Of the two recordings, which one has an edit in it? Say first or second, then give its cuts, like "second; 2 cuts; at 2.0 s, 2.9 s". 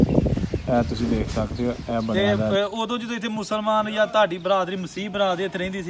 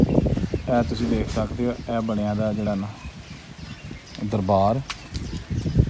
first; 1 cut; at 2.5 s